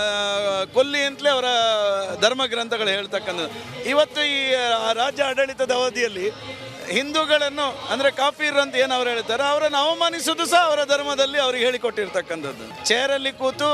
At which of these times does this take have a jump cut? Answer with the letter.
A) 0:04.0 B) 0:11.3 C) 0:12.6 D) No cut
C